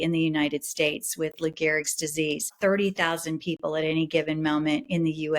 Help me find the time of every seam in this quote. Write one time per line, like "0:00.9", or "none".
0:02.5